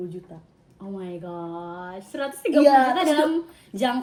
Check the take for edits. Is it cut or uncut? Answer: uncut